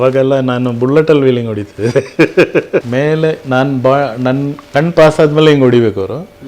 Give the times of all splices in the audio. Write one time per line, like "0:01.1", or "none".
0:02.9